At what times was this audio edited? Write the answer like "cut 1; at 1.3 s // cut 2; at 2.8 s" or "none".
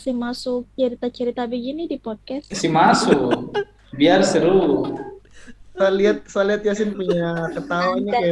none